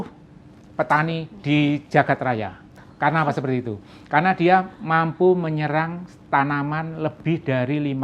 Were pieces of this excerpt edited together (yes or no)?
no